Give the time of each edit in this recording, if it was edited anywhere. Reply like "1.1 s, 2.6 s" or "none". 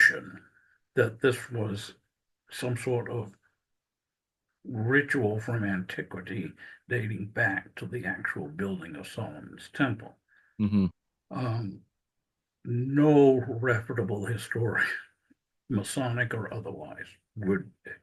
none